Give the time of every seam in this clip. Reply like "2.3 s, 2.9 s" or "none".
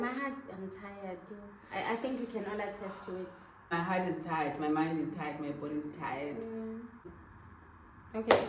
3.7 s, 7.1 s